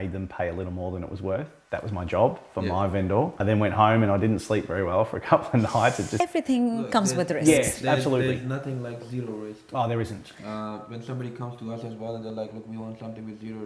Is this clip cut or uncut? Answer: cut